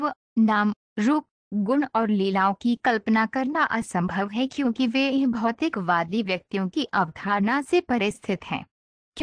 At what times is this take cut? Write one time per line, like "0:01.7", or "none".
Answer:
none